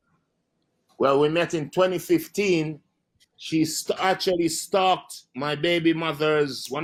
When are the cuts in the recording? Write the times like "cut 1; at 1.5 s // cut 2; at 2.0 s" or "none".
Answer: none